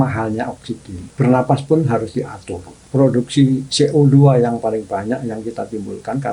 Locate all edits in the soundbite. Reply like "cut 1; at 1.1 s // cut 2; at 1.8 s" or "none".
cut 1; at 1.0 s // cut 2; at 2.8 s